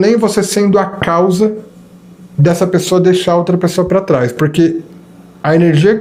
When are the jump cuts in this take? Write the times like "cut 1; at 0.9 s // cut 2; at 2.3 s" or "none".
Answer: none